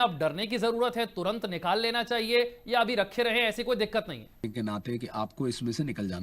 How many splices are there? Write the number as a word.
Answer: one